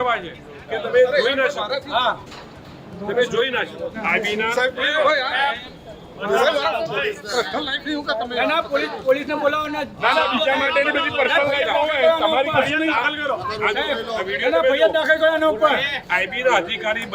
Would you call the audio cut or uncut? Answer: cut